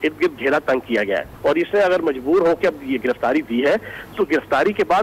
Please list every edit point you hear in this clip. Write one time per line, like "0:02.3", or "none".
0:01.3

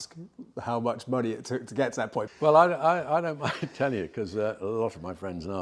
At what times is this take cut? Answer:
0:02.3

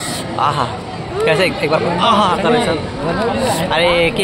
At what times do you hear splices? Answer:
none

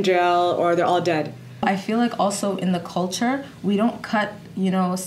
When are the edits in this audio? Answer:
0:01.6

